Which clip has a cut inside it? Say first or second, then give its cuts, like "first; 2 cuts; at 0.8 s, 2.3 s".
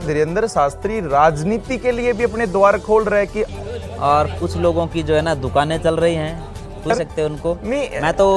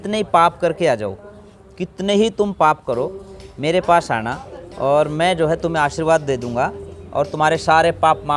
first; 2 cuts; at 3.5 s, 6.9 s